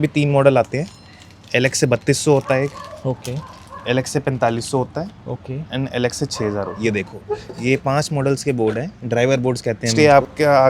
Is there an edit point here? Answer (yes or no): yes